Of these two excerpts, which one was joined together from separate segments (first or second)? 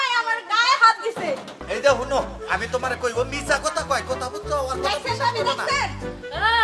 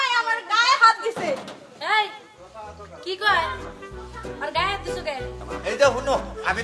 first